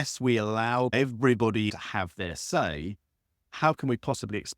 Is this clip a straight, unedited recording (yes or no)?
no